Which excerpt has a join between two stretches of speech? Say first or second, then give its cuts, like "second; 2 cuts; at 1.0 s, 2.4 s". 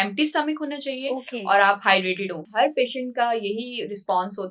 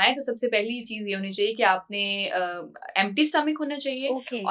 first; 1 cut; at 2.5 s